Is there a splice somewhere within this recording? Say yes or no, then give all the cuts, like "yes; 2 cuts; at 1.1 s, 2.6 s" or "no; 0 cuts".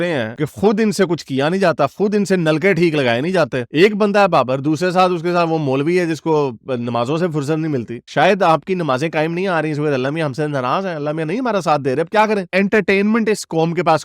yes; 3 cuts; at 3.6 s, 8.0 s, 12.5 s